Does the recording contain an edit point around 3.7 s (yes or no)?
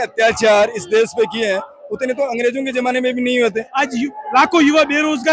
yes